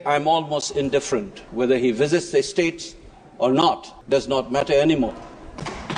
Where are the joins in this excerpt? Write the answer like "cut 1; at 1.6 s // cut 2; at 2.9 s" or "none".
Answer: cut 1; at 3.9 s